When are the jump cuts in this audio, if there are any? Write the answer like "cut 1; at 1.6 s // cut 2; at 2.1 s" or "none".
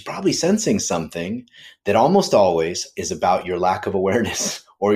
cut 1; at 2.9 s